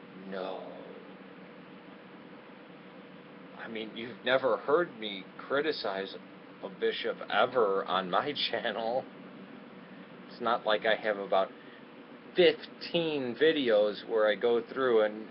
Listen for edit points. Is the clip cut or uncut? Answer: uncut